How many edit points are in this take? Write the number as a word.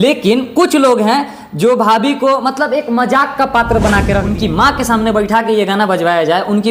one